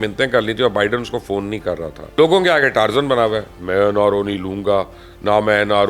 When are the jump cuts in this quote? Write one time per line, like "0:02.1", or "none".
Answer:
0:02.1

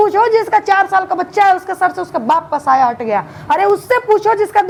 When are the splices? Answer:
none

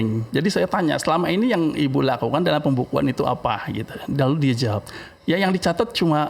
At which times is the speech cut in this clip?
none

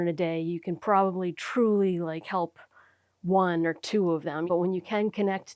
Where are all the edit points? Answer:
0:04.5

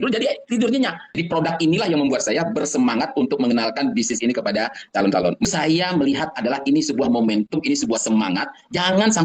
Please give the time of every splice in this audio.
0:01.1
0:05.4

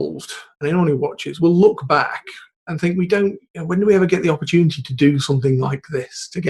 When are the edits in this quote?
0:01.3

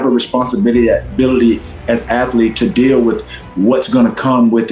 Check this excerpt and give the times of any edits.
none

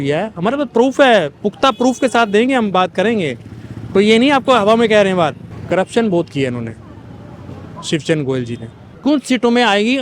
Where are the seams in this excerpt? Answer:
0:05.5
0:08.8

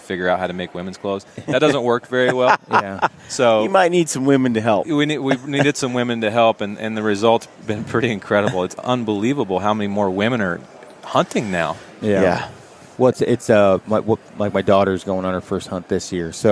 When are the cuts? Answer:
none

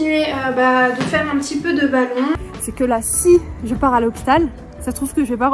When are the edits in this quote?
0:02.4

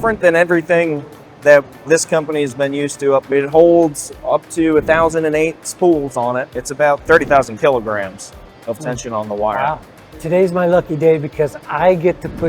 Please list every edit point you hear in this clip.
0:03.3
0:06.5
0:10.0

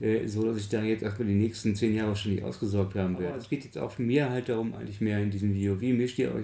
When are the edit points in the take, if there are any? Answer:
0:03.4

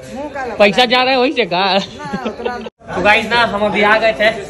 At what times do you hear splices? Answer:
0:02.6

